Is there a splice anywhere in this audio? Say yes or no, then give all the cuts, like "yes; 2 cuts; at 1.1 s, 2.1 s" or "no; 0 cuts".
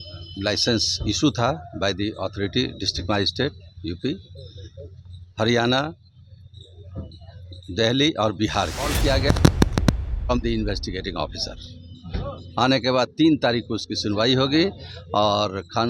yes; 1 cut; at 9.0 s